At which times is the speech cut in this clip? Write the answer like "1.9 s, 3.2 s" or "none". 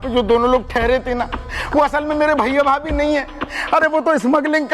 none